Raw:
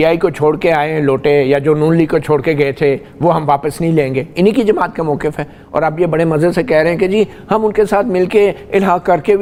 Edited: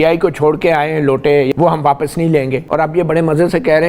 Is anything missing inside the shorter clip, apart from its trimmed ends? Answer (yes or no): yes